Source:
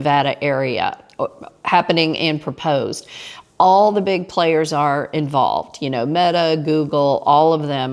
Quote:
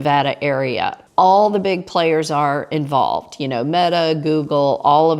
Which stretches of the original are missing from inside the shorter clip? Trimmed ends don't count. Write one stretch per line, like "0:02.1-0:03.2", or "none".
0:01.0-0:03.4